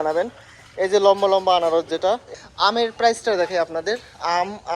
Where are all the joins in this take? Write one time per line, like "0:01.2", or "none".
0:02.3